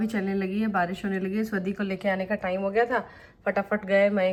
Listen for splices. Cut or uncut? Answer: uncut